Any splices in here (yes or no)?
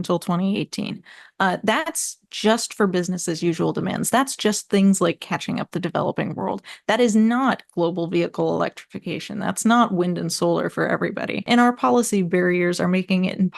yes